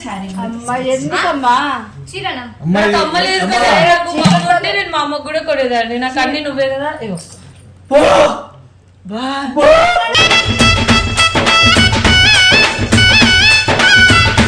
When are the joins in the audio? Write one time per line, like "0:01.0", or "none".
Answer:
none